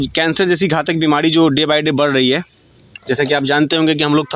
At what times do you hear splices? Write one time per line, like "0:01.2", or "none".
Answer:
none